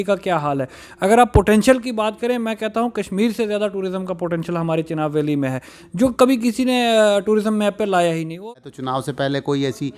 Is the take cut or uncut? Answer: cut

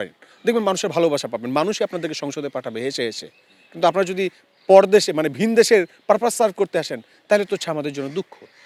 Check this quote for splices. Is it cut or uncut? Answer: uncut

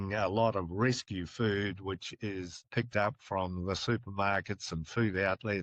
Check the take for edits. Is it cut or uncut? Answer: cut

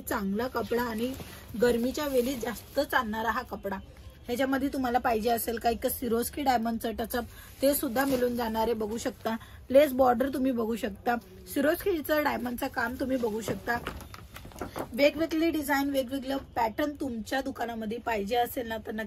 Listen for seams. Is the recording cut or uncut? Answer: uncut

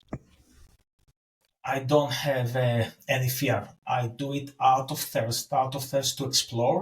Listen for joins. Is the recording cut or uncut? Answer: uncut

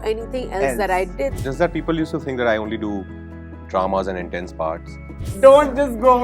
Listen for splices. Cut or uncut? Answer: cut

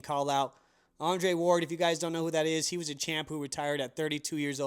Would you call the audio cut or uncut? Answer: uncut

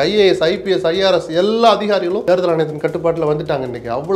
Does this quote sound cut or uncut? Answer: cut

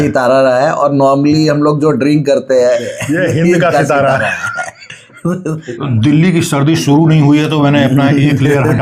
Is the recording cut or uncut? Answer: cut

